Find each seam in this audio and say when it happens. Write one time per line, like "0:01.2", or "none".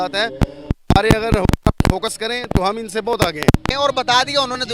0:03.7